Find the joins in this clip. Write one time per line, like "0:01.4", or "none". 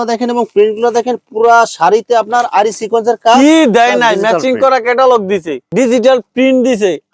none